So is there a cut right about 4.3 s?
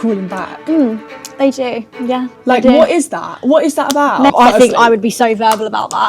yes; 1 cut; at 4.3 s

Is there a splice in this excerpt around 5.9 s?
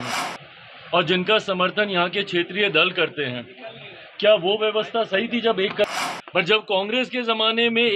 yes; 1 cut; at 5.9 s

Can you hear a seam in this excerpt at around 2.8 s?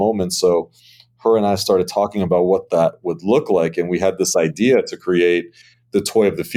no; 0 cuts

